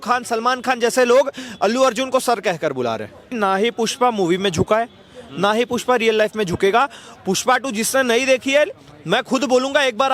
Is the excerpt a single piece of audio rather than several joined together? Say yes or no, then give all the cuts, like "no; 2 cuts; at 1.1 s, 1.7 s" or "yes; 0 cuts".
no; 2 cuts; at 3.3 s, 7.1 s